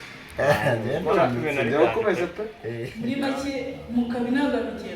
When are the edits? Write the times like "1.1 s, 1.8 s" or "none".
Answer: 2.3 s